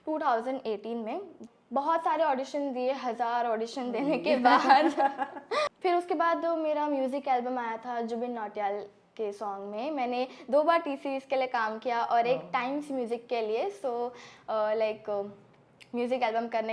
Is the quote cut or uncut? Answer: cut